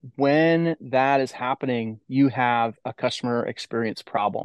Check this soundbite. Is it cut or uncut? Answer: uncut